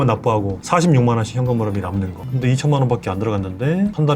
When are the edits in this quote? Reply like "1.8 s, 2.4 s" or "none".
2.2 s